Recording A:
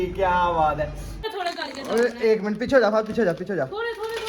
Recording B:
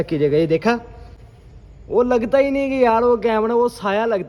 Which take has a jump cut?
A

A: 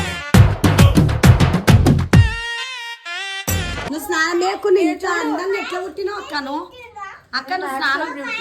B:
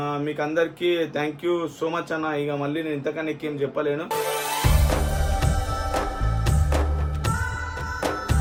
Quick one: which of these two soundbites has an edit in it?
A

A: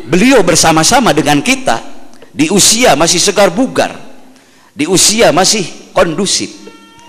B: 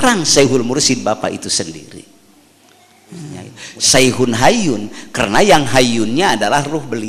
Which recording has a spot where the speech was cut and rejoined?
B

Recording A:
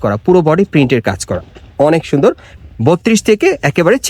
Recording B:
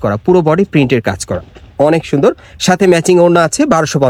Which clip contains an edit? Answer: A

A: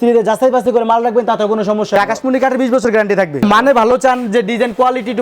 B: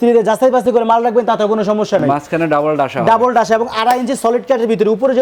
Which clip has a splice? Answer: A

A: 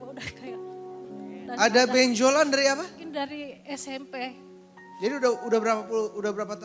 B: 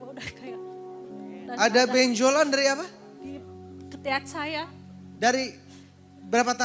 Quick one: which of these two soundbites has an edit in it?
A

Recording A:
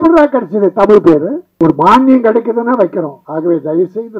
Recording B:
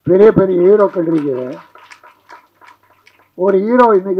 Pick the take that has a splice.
A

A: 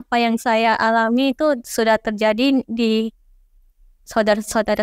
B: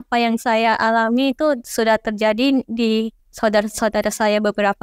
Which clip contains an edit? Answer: B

